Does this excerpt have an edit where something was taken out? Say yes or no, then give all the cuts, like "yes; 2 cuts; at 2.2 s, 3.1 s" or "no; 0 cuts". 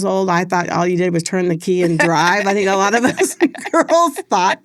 no; 0 cuts